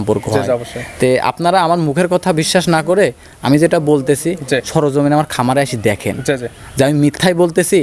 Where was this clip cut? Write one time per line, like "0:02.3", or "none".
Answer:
none